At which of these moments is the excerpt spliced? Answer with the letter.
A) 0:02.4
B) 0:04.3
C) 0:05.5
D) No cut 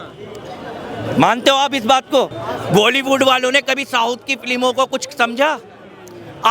A